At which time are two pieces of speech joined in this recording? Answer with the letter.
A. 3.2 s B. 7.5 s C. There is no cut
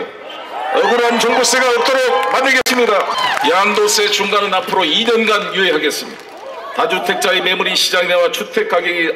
A